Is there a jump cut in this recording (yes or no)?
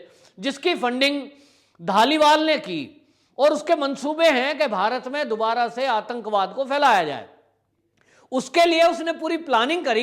no